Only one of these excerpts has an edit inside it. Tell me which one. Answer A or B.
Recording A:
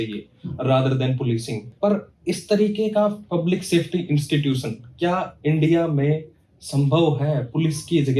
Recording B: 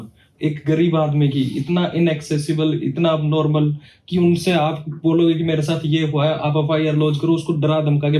A